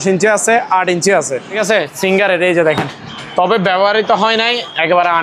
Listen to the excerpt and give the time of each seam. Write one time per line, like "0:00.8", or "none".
0:01.5